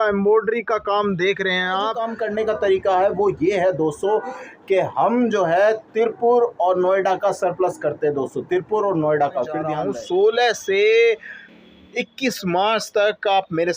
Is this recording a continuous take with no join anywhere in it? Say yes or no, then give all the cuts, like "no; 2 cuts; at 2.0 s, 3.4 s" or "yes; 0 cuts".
no; 2 cuts; at 2.1 s, 9.7 s